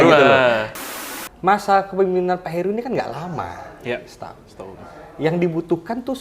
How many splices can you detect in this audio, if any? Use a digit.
1